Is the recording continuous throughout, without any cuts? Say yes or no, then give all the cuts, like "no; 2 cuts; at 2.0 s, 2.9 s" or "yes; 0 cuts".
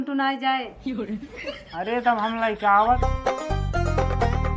no; 1 cut; at 3.0 s